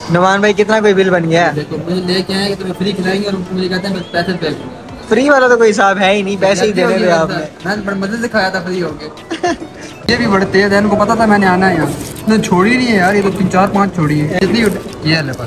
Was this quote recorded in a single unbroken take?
no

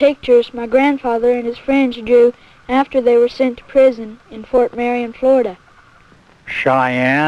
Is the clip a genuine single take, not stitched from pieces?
yes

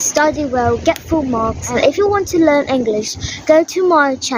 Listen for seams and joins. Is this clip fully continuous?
no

